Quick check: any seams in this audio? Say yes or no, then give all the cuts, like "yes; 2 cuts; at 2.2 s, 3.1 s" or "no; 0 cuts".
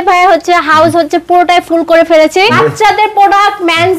yes; 1 cut; at 2.5 s